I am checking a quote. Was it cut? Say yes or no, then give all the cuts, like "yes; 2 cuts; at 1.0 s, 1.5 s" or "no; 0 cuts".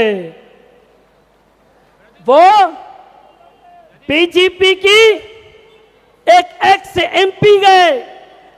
no; 0 cuts